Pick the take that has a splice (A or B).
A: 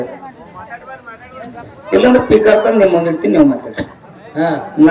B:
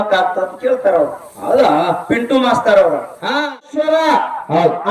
B